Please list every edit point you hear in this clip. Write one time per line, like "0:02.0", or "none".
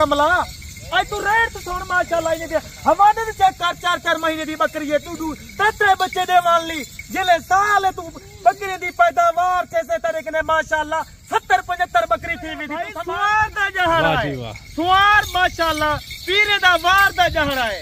0:12.9